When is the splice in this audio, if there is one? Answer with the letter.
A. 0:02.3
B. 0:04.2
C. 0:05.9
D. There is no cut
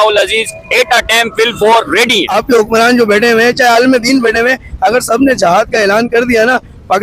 A